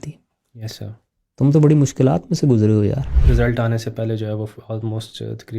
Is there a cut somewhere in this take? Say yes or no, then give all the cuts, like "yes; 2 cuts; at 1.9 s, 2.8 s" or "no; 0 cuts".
yes; 1 cut; at 3.1 s